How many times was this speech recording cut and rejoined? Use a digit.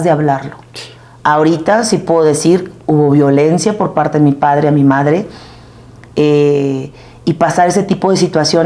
0